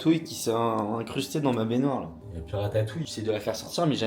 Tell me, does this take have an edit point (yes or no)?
yes